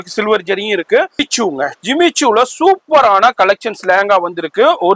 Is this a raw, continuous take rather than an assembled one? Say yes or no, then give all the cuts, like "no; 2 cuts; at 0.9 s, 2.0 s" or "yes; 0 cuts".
no; 1 cut; at 1.3 s